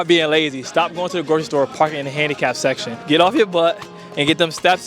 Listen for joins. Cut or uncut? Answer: cut